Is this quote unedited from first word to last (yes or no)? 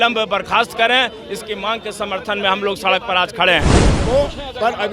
no